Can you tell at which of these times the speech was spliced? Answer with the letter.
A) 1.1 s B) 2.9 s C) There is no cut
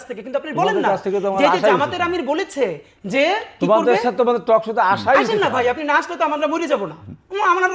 C